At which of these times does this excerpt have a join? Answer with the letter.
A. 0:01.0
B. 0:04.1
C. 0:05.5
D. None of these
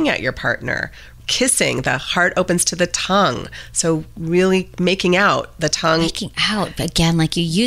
A